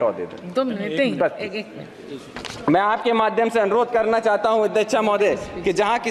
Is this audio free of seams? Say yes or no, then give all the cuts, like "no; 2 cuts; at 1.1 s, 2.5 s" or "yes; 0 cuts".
yes; 0 cuts